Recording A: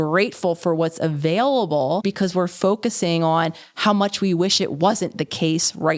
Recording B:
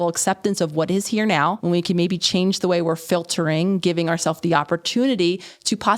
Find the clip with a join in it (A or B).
B